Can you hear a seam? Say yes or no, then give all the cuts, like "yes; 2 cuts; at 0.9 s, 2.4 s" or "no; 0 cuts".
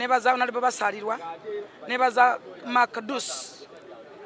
no; 0 cuts